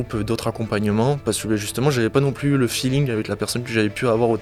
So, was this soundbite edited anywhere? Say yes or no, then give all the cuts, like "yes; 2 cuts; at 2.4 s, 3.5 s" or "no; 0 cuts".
no; 0 cuts